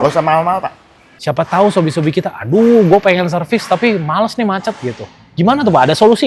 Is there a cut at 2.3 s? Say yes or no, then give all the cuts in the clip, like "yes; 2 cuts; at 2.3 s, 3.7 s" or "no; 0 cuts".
no; 1 cut; at 1.1 s